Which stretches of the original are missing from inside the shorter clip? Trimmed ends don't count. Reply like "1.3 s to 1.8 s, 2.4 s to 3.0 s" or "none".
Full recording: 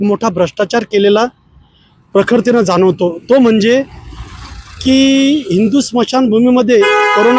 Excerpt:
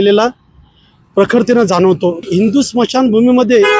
3.2 s to 5.4 s